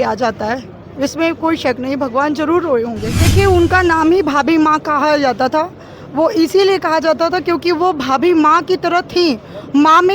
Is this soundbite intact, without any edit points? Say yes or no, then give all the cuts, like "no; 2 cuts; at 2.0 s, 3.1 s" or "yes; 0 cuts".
no; 1 cut; at 3.2 s